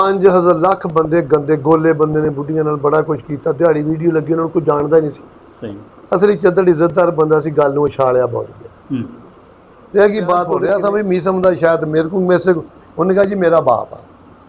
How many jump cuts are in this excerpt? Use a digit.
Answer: 1